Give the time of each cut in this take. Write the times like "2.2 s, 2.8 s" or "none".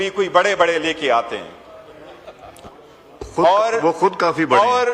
none